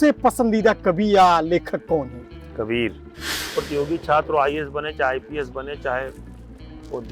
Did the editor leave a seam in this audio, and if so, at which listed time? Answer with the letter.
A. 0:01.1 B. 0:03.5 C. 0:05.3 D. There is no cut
B